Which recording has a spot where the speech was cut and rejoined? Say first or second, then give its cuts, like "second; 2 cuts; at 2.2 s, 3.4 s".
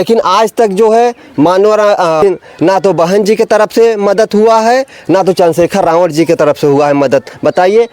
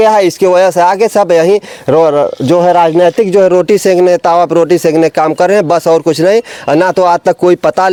first; 1 cut; at 2.2 s